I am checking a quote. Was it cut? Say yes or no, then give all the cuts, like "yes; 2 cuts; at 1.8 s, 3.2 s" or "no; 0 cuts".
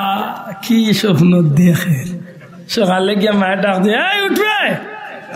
no; 0 cuts